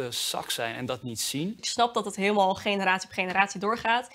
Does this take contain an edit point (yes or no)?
yes